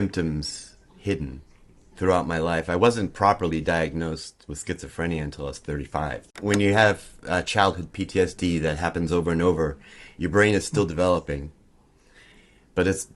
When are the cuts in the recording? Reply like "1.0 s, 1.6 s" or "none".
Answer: 6.3 s